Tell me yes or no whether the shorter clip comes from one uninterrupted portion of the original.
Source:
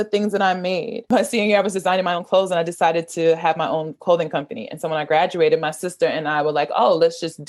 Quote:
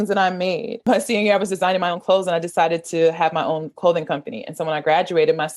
yes